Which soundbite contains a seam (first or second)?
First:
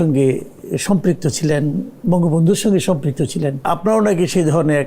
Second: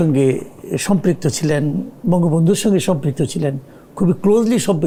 first